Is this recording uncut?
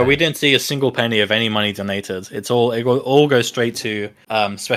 yes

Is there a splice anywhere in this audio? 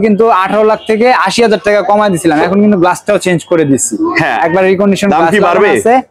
no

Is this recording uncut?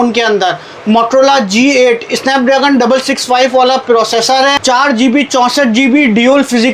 no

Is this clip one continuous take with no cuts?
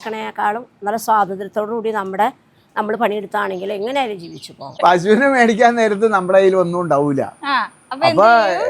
no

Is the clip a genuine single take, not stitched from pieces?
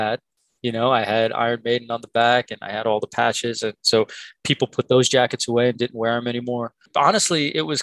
no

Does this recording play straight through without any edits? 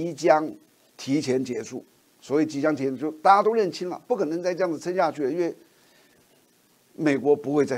yes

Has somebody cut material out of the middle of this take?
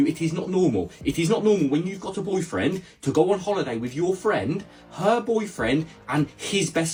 no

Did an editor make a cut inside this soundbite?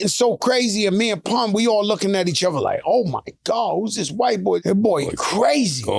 yes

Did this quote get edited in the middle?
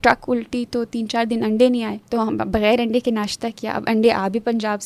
yes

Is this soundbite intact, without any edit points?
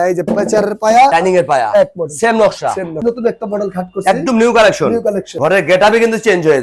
no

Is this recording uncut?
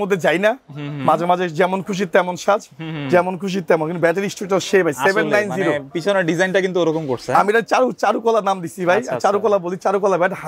yes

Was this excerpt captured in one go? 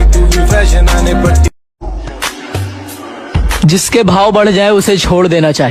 no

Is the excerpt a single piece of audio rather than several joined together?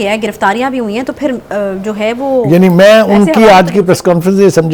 yes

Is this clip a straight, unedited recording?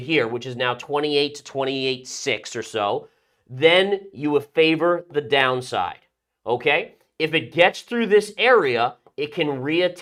yes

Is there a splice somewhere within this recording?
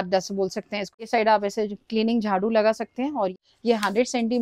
yes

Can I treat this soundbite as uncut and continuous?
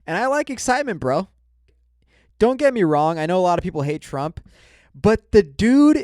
no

